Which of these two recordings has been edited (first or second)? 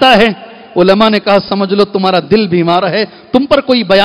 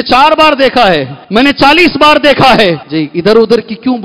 second